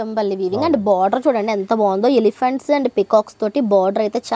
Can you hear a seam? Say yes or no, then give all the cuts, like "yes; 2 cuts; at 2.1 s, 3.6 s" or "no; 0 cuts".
no; 0 cuts